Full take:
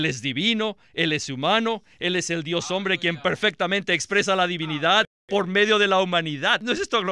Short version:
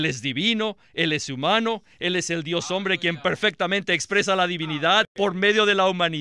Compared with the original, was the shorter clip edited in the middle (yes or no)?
yes